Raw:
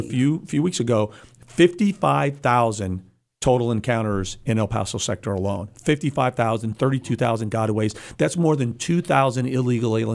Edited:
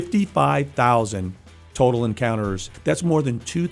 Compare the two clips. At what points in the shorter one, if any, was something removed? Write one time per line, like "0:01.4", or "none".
0:02.7